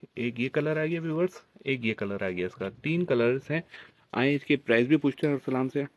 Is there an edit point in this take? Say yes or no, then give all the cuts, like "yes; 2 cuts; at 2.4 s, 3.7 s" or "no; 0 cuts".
no; 0 cuts